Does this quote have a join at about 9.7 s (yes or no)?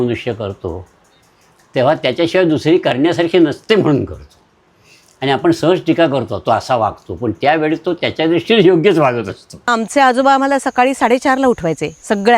yes